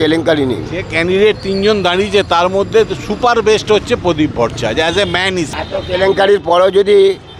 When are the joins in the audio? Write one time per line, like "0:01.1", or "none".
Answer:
0:05.5

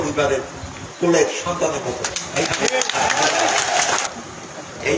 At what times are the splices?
0:04.1

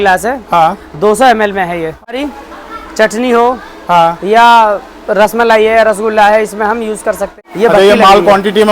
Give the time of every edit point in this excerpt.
0:02.2
0:07.3

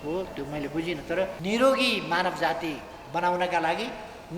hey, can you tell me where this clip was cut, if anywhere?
0:01.4

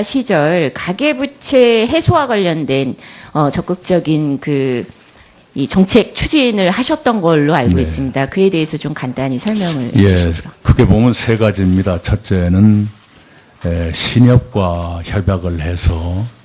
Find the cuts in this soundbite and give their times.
0:10.9

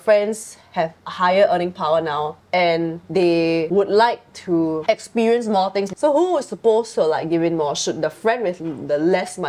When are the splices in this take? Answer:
0:01.0
0:02.4
0:03.5
0:05.9

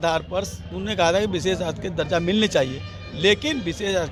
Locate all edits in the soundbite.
none

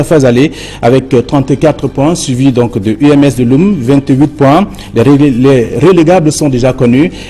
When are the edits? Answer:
none

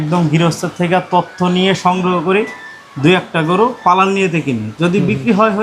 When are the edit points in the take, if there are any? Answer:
none

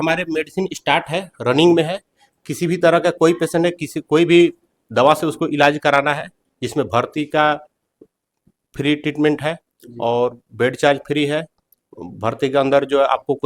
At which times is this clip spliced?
0:01.1

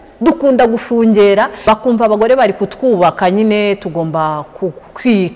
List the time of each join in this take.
0:01.5

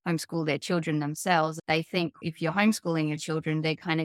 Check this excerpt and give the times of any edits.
0:01.8

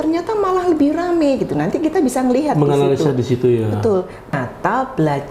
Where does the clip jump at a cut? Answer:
0:04.3

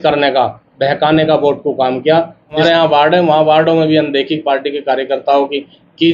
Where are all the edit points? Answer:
0:02.6

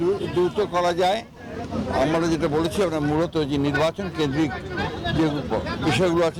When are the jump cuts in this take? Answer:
none

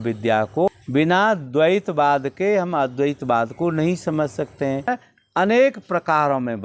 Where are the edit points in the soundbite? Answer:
0:00.7
0:04.9

